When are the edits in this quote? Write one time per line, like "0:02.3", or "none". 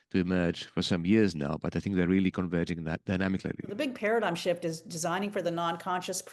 0:03.7